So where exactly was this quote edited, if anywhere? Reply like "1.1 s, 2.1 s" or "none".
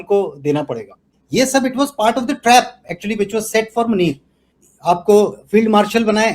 1.1 s, 4.5 s